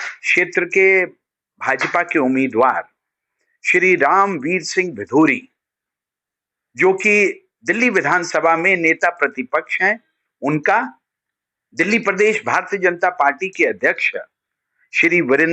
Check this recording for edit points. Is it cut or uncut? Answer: uncut